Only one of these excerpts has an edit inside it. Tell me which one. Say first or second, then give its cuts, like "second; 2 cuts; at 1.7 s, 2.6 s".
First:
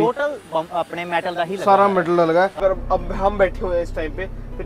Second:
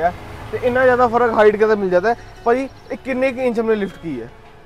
first; 1 cut; at 2.5 s